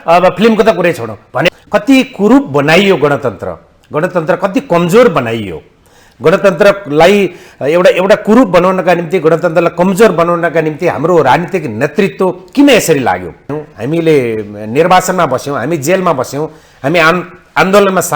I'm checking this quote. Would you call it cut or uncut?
cut